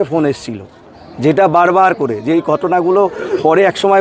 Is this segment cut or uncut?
uncut